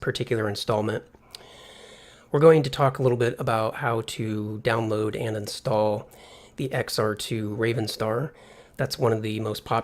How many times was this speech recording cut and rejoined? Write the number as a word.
one